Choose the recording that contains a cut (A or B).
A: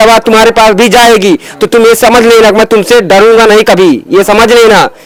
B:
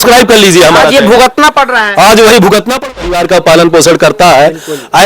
B